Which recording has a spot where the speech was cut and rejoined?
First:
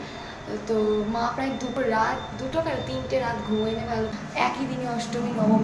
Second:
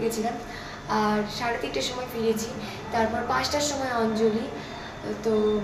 first; 1 cut; at 4.1 s

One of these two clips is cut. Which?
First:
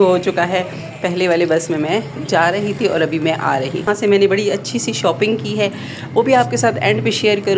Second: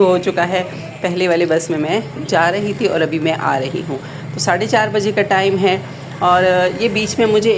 first; 1 cut; at 3.9 s

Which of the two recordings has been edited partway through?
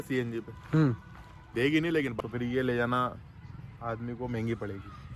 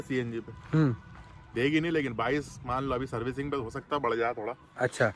first; 1 cut; at 2.1 s

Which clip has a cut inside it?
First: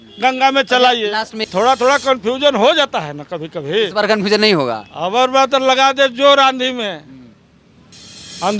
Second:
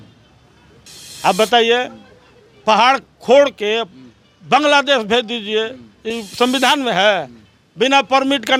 first; 1 cut; at 1.4 s

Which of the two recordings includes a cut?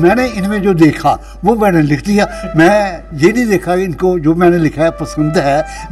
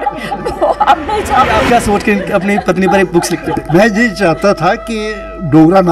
second; 1 cut; at 1.6 s

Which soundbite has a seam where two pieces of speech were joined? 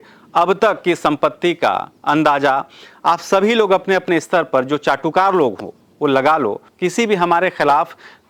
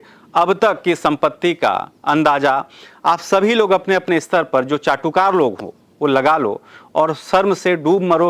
first; 1 cut; at 6.7 s

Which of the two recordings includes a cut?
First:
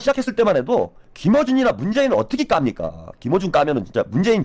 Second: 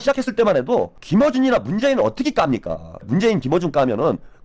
second; 2 cuts; at 1.0 s, 3.1 s

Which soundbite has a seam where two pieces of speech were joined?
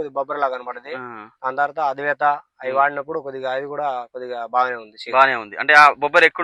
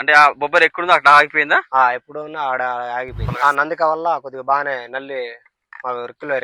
second; 1 cut; at 3.2 s

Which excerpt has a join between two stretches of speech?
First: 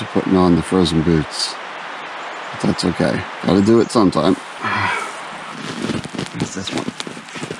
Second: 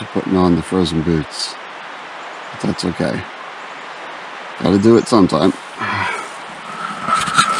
first; 2 cuts; at 3.3 s, 5.5 s

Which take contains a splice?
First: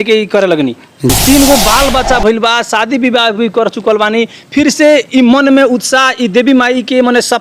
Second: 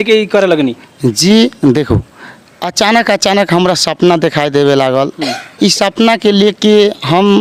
first; 1 cut; at 1.2 s

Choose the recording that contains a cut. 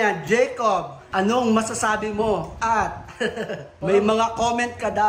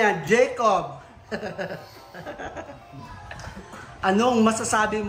first; 3 cuts; at 1.0 s, 2.5 s, 3.7 s

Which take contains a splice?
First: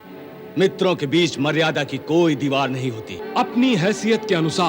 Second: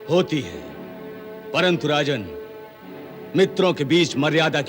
first; 1 cut; at 3.1 s

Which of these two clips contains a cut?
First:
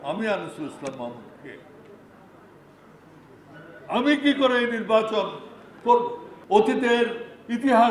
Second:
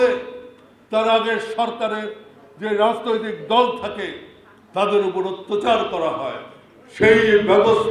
first; 1 cut; at 6.3 s

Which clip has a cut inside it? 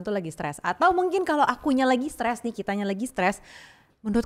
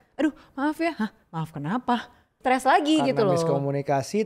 second; 1 cut; at 2.4 s

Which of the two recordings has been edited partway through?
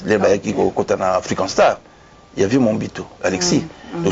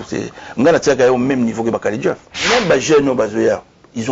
second; 1 cut; at 2.5 s

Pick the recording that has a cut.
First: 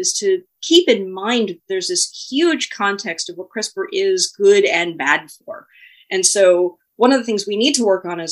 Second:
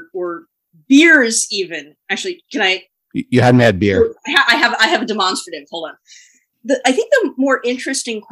second; 1 cut; at 6.5 s

